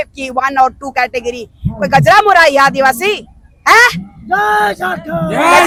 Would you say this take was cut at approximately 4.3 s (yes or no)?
no